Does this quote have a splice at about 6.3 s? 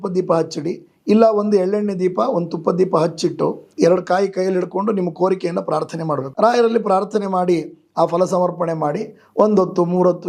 yes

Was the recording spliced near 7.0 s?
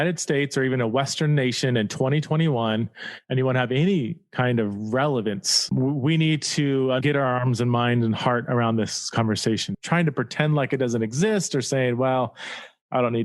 yes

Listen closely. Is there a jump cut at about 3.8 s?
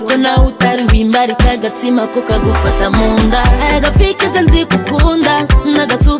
no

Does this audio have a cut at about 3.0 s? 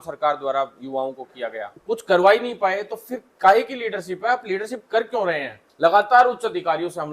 no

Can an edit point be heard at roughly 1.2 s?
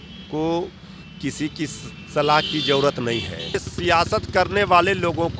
no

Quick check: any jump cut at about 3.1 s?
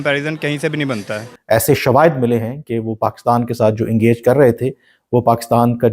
no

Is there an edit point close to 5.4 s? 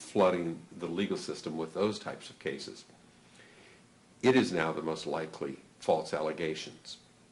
yes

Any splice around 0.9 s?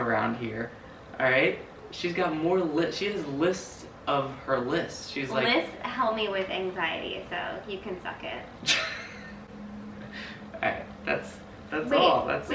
no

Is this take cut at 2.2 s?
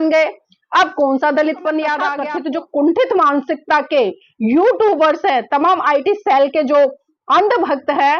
yes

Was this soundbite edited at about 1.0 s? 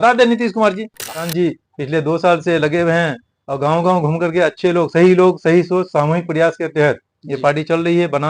yes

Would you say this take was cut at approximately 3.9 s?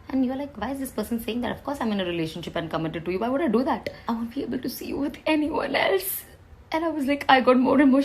yes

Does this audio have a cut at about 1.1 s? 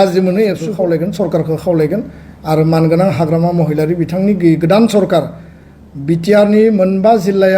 yes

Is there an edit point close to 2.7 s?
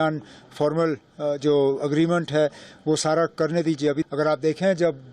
no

